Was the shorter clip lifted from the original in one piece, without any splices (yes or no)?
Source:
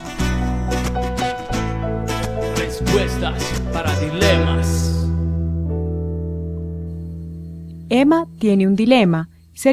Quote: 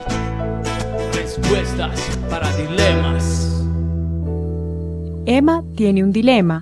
no